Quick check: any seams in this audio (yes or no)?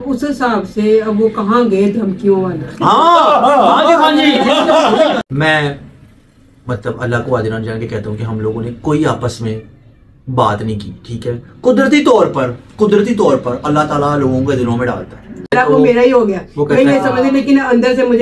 yes